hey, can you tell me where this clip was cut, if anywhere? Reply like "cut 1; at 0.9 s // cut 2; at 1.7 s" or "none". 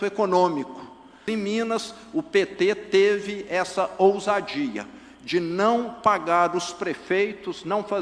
cut 1; at 1.2 s